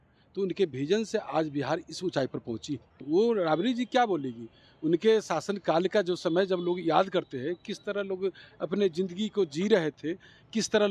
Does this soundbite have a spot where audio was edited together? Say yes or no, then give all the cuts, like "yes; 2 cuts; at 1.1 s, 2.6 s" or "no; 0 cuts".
yes; 1 cut; at 2.9 s